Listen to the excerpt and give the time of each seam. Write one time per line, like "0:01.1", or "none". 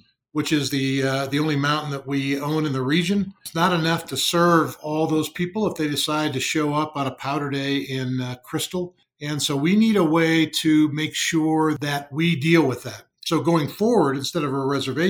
0:03.4
0:09.1
0:11.8